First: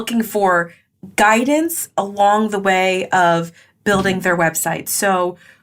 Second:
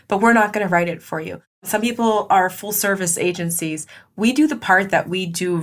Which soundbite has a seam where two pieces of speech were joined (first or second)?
second